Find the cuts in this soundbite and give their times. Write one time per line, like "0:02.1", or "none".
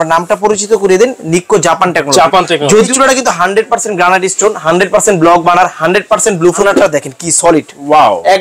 0:02.9
0:06.6